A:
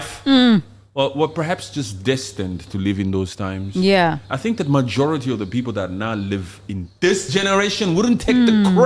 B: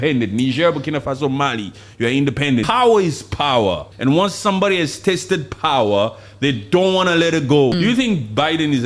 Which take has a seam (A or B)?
B